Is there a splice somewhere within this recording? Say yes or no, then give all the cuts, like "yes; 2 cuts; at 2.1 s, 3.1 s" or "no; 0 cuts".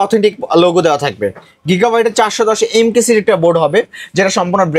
no; 0 cuts